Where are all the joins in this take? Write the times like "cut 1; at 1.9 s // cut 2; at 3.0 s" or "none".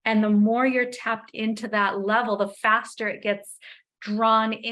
none